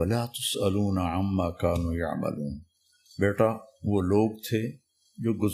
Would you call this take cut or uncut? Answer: uncut